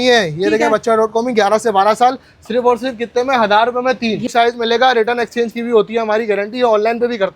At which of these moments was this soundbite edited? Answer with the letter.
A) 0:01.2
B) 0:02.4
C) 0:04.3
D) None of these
C